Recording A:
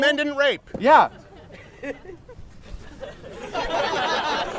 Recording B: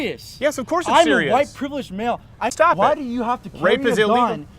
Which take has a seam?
B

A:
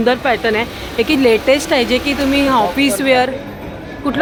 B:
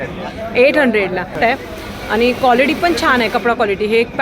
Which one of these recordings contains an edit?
B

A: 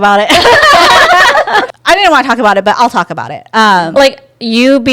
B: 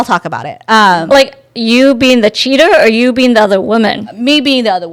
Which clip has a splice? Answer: A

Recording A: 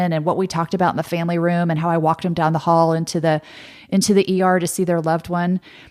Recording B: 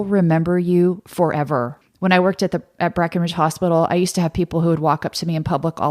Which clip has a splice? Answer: B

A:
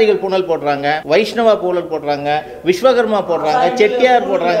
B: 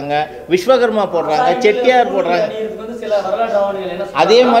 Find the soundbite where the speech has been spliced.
A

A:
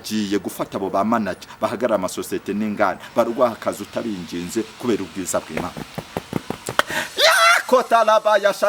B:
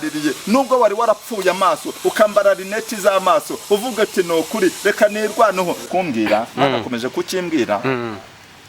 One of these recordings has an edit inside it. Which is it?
B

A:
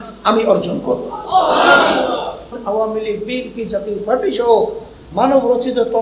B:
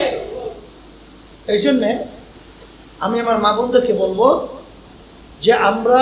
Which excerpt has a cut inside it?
A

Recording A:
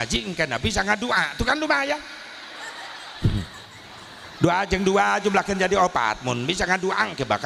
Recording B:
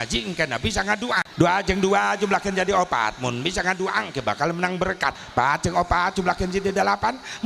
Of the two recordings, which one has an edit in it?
B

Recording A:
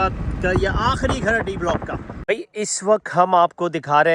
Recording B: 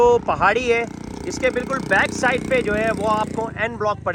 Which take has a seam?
A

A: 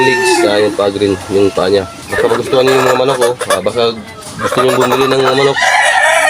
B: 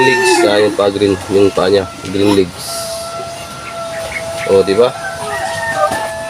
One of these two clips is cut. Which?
A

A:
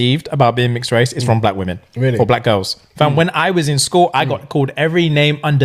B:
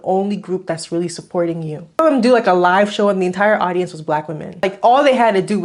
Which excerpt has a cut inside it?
B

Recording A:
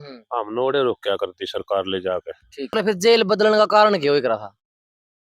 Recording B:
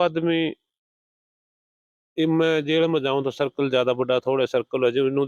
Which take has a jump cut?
A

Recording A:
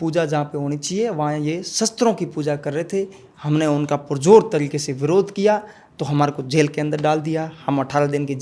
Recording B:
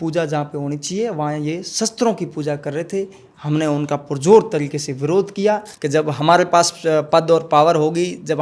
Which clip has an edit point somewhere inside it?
B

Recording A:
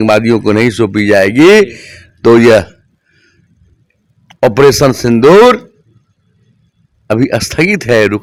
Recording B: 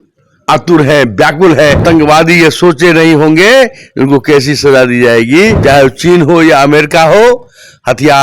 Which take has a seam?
B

